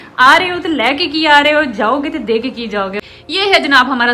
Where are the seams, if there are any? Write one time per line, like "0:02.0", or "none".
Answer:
0:03.0